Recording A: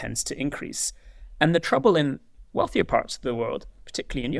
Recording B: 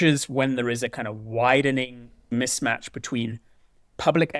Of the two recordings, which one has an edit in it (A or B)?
B